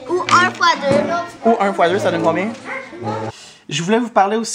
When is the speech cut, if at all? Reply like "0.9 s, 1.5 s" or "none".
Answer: 3.3 s